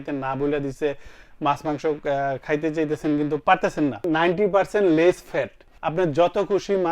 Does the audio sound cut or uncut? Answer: cut